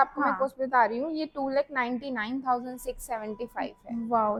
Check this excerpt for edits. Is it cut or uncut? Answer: uncut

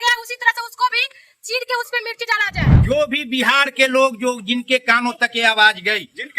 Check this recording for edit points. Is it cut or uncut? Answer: cut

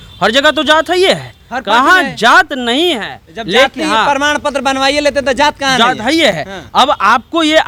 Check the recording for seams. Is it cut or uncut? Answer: uncut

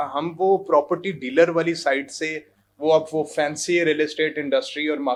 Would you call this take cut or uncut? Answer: uncut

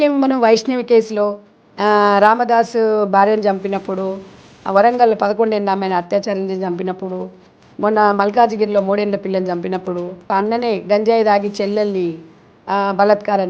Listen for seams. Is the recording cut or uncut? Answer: cut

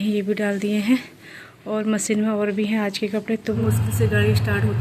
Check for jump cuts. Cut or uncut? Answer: cut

